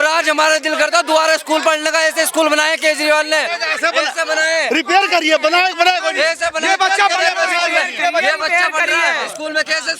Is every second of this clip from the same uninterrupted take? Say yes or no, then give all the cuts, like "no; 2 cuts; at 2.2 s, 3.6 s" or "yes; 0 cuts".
yes; 0 cuts